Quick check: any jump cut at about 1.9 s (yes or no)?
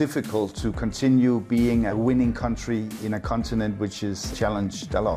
yes